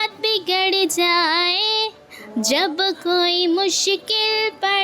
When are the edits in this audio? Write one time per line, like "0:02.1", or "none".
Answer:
none